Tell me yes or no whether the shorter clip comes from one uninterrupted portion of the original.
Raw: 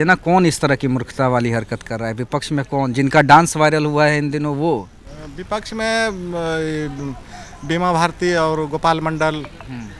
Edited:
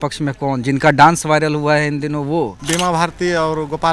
no